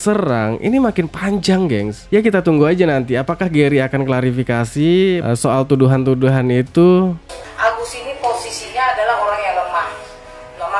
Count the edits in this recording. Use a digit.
1